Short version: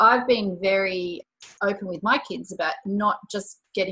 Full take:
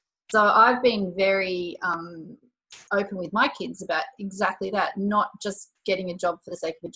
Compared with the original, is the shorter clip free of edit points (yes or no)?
no